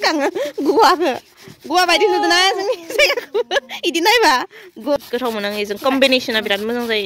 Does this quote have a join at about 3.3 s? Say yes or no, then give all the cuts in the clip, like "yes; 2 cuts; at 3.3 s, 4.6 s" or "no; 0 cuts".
no; 1 cut; at 5.1 s